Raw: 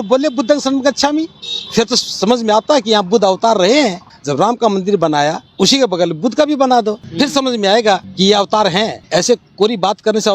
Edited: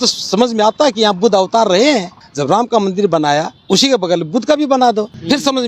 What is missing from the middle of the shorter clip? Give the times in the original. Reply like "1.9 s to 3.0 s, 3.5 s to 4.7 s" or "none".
none